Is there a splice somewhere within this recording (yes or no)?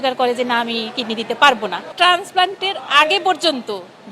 yes